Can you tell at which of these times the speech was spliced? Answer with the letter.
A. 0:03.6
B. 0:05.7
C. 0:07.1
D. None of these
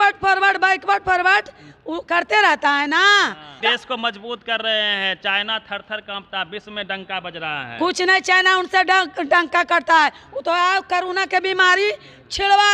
A